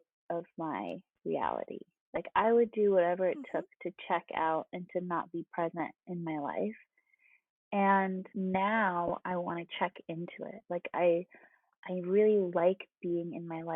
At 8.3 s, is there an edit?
yes; 1 cut; at 8.3 s

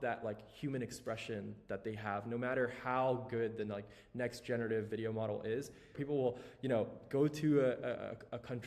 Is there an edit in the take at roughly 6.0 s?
yes; 1 cut; at 6.0 s

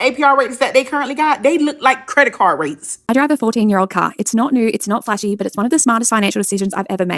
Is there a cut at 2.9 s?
yes; 1 cut; at 2.9 s

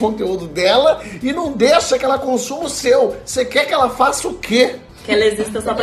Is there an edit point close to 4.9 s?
yes; 1 cut; at 4.9 s

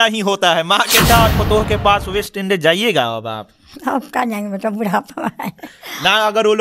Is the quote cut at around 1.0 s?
yes; 1 cut; at 1.0 s

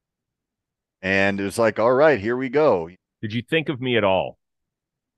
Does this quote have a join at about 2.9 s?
yes; 1 cut; at 2.9 s

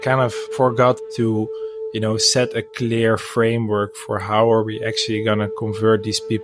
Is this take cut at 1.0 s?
yes; 1 cut; at 1.0 s

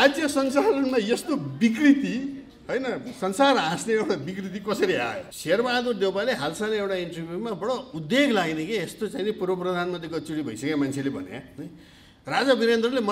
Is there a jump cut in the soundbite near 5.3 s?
yes; 1 cut; at 5.3 s

